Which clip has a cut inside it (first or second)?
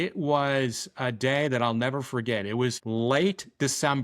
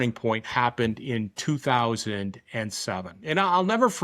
first